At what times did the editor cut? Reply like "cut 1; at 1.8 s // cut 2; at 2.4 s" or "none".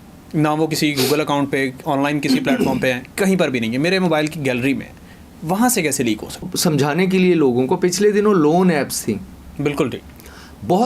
cut 1; at 6.5 s